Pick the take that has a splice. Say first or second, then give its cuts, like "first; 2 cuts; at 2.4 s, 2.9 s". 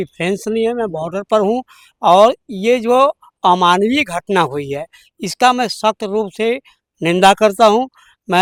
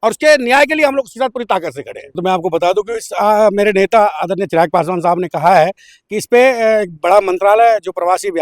second; 1 cut; at 2.2 s